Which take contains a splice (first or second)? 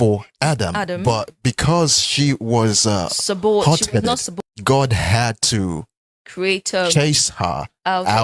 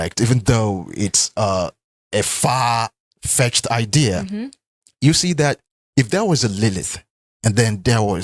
first